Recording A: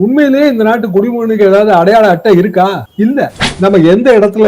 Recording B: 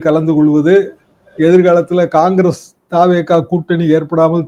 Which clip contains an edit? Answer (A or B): A